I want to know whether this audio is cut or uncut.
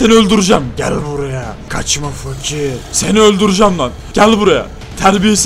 cut